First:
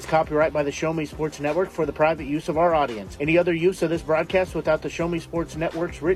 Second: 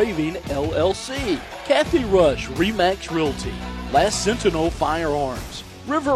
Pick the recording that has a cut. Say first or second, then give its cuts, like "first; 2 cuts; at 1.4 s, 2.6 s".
second; 1 cut; at 1.5 s